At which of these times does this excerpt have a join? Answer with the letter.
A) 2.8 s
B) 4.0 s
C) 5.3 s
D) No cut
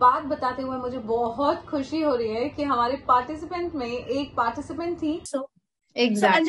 C